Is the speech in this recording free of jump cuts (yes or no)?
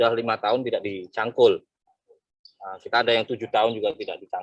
yes